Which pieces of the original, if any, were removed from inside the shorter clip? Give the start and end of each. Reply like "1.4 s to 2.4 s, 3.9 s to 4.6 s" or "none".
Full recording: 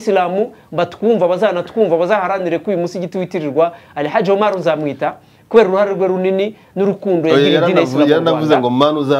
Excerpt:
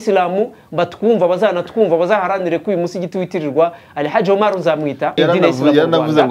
5.2 s to 7.5 s